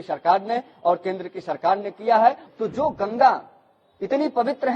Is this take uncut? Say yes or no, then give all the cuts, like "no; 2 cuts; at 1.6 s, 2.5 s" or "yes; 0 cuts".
no; 1 cut; at 2.4 s